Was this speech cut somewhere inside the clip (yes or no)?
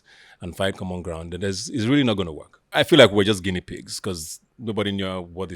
yes